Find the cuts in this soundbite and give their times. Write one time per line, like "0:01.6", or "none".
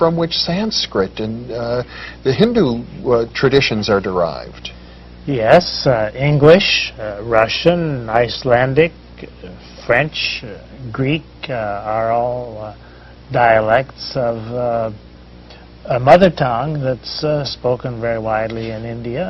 0:13.2